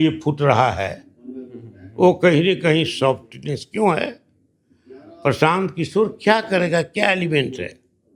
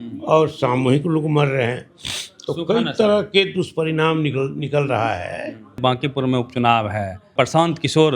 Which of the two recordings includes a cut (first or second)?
second